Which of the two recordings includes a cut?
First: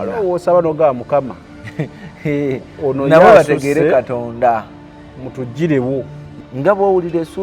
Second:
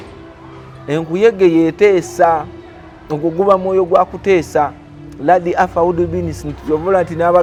first; 1 cut; at 6.2 s

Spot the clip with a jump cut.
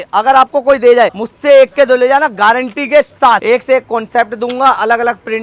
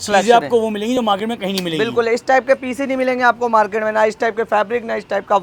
first; 2 cuts; at 1.3 s, 3.4 s

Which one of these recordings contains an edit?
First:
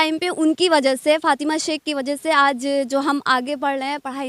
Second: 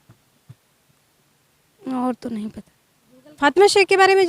second; 1 cut; at 3.3 s

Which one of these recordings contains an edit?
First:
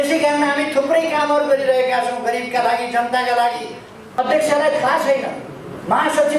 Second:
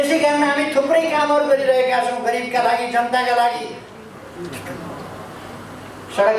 first; 1 cut; at 4.2 s

